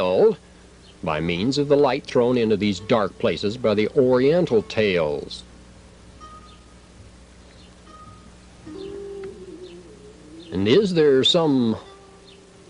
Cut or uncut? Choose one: cut